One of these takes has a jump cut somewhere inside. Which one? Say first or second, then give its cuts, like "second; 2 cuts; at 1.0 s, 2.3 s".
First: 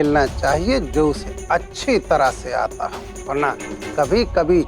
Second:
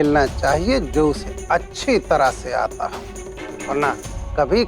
first; 1 cut; at 3.1 s